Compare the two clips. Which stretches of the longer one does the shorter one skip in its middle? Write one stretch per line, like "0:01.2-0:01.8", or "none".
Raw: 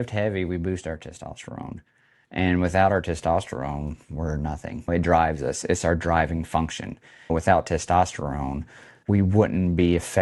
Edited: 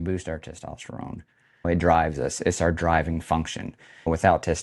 0:02.1-0:04.7